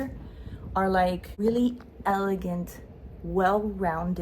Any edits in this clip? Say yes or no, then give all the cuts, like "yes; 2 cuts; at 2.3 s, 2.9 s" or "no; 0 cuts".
yes; 1 cut; at 1.3 s